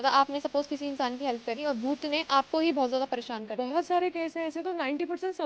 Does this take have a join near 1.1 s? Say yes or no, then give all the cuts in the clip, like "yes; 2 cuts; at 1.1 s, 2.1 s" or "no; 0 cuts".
no; 0 cuts